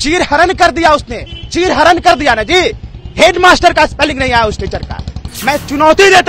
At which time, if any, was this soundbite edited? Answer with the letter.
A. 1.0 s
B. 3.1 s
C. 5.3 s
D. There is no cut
C